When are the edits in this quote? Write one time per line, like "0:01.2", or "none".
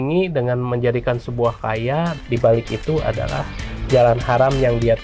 0:02.2